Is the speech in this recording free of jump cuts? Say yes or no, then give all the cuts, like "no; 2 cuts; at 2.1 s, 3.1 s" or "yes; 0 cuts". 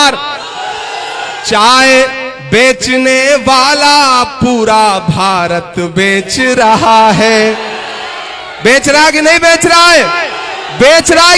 no; 1 cut; at 1.4 s